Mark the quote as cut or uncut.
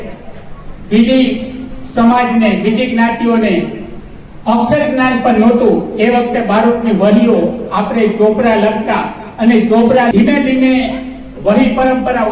cut